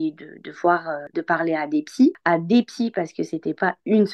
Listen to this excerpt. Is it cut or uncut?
uncut